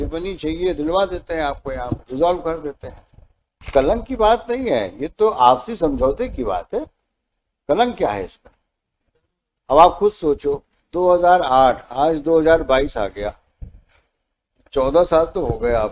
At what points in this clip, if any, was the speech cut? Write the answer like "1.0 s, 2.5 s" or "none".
3.7 s